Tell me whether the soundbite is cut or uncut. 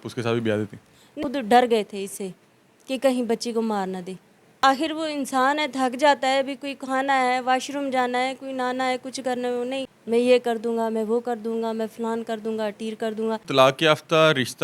cut